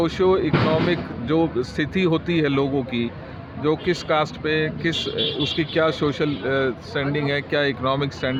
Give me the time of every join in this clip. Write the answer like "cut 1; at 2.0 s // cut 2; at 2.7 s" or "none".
none